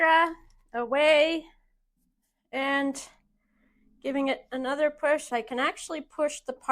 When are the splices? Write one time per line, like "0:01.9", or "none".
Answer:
0:05.3